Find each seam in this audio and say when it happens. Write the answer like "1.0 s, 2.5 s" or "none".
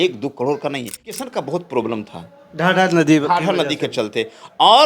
1.2 s